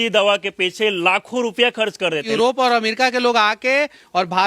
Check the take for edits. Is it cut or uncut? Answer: cut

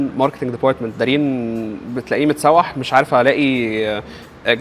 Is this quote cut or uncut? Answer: uncut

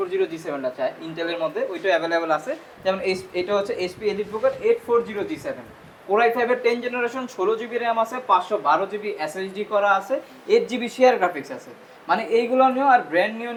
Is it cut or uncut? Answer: uncut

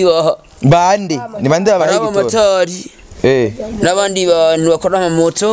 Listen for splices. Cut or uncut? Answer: uncut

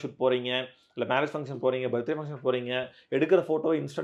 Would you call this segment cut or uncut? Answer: uncut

